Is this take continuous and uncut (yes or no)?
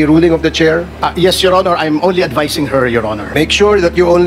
no